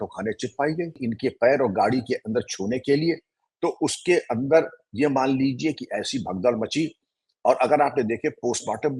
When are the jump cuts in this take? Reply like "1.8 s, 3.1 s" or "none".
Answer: 1.1 s